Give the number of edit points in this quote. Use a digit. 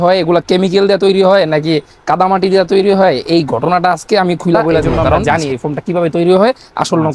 1